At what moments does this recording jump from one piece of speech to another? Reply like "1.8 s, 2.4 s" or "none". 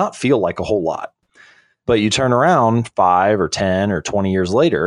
1.2 s